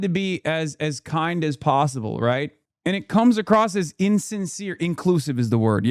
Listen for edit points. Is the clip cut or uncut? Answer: cut